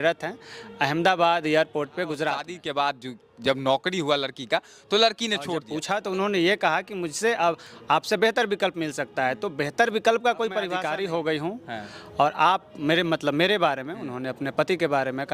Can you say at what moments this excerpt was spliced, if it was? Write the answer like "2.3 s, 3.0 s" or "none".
2.5 s, 5.7 s, 10.8 s